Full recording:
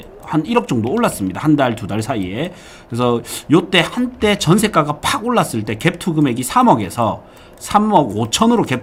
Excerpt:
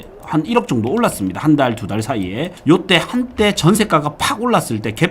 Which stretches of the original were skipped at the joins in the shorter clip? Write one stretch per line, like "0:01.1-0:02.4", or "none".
0:02.5-0:03.4